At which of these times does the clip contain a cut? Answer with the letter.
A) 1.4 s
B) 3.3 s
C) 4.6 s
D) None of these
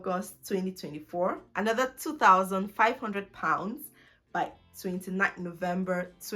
A